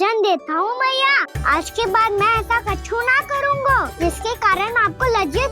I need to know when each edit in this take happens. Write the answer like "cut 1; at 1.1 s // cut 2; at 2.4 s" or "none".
cut 1; at 1.3 s // cut 2; at 3.9 s